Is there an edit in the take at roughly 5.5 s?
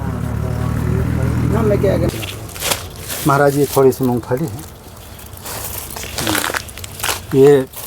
no; 1 cut; at 2.1 s

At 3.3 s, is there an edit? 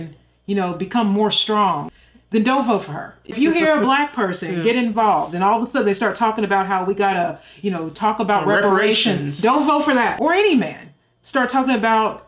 no; 2 cuts; at 1.9 s, 10.1 s

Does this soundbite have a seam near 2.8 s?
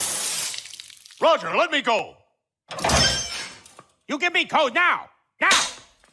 no; 0 cuts

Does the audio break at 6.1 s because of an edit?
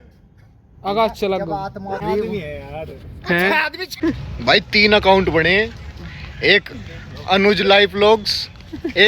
no; 2 cuts; at 2.0 s, 3.9 s

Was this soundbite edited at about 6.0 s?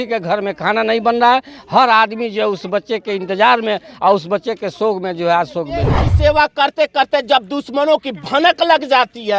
yes; 1 cut; at 6.0 s

